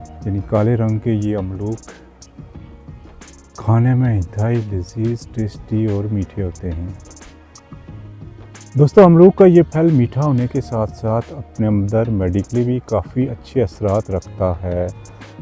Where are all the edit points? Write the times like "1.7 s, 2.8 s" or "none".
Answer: none